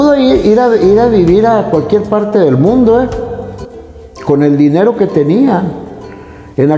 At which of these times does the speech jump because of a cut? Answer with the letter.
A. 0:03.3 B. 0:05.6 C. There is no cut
C